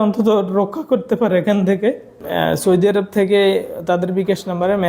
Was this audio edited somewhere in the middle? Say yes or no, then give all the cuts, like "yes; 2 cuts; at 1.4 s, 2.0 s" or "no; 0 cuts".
yes; 1 cut; at 2.2 s